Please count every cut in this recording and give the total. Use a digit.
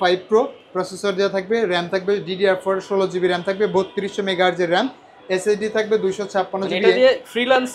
0